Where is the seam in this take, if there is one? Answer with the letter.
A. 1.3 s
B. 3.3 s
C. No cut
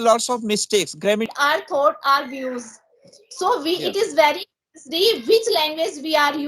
A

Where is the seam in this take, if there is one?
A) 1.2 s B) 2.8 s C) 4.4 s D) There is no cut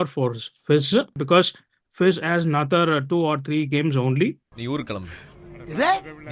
A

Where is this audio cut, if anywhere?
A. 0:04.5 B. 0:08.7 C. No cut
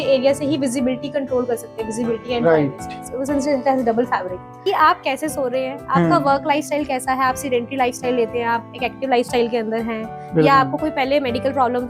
A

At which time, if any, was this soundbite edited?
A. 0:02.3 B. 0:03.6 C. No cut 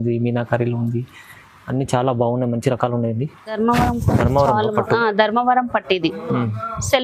B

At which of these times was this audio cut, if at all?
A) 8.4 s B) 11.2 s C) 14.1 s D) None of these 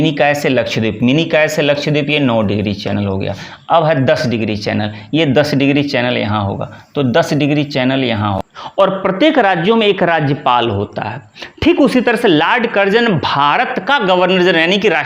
A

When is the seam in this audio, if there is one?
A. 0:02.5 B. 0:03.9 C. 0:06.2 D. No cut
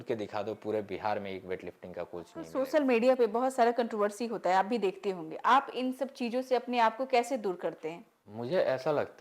A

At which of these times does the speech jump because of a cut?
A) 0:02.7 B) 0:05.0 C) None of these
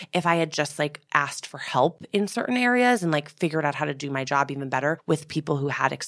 B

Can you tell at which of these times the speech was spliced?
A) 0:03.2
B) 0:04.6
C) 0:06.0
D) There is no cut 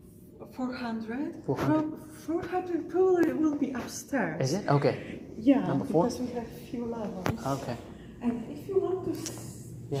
D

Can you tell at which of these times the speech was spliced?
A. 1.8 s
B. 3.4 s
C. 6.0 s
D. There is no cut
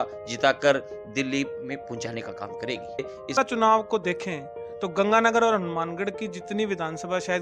B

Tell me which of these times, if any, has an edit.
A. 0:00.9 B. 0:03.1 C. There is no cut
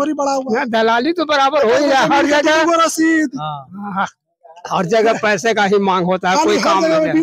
C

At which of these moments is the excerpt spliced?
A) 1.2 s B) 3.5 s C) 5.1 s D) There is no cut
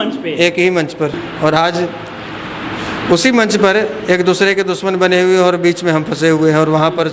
A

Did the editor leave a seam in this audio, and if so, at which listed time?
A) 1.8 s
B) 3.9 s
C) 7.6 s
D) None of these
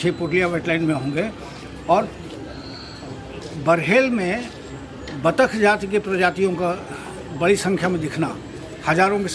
D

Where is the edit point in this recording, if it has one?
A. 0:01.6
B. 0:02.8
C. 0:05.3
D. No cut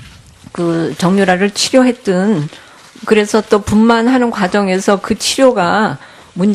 D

